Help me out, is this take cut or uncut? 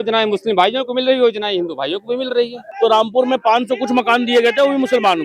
cut